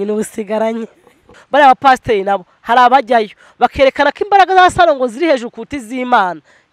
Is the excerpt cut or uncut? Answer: cut